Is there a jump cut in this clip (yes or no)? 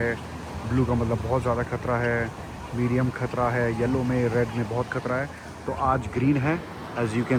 no